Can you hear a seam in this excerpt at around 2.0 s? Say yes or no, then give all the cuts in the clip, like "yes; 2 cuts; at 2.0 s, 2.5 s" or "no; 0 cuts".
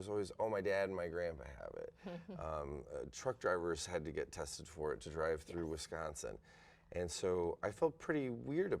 no; 0 cuts